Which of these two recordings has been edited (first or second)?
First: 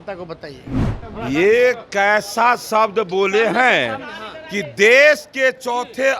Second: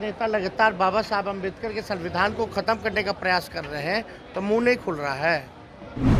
first